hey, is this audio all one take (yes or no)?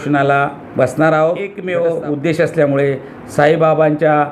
no